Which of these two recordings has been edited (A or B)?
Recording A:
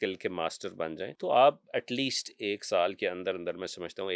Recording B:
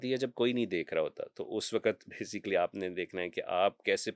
A